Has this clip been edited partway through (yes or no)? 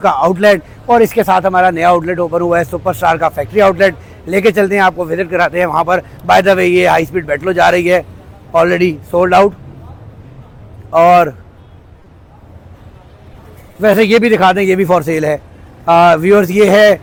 no